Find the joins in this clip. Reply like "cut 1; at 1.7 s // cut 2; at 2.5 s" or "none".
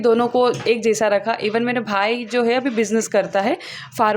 none